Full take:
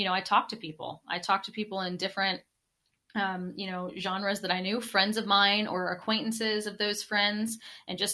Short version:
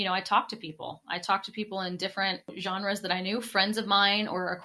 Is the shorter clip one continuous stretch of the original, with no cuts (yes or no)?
no